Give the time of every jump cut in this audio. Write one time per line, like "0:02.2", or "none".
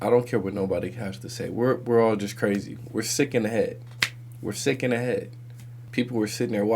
0:05.8